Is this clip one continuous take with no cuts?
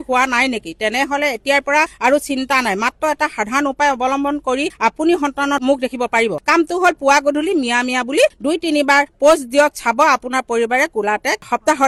yes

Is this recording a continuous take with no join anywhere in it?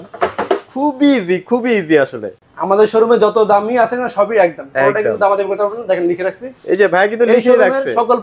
no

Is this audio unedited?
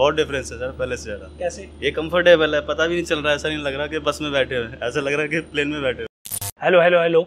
no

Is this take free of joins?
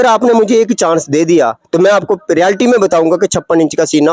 yes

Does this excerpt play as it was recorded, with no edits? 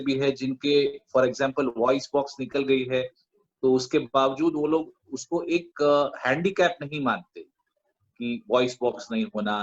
yes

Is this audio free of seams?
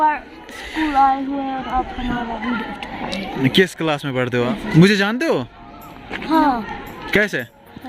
no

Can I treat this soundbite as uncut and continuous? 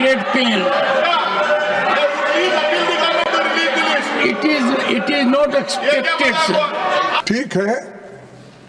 no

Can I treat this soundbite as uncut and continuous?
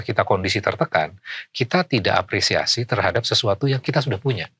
yes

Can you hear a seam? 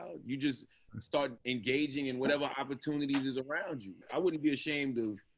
yes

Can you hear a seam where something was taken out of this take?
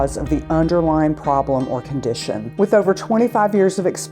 yes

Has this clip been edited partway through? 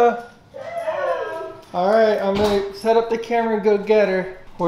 no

